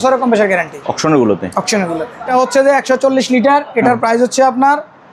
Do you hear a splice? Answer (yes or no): yes